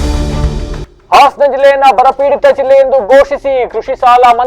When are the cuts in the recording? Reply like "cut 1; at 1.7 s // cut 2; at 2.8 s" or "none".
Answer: cut 1; at 0.9 s